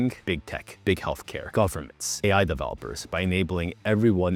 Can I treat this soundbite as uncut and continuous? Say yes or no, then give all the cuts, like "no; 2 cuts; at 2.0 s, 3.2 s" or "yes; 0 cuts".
yes; 0 cuts